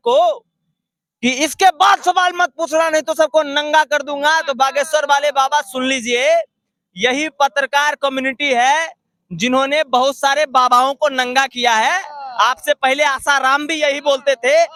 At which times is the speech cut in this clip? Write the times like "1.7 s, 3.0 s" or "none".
none